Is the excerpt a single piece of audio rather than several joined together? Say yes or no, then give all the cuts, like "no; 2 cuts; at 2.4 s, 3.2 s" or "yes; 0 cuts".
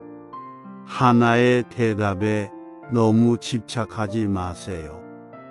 yes; 0 cuts